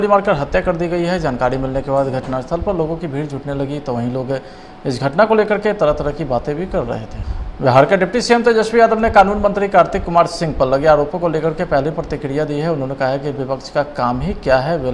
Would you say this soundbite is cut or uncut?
cut